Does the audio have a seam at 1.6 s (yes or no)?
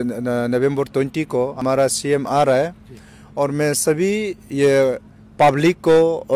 yes